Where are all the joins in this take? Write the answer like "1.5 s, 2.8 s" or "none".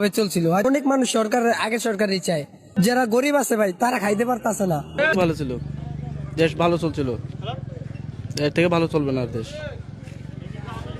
5.2 s